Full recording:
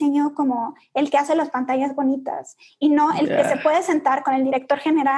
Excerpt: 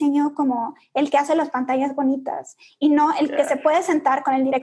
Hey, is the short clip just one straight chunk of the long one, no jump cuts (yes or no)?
yes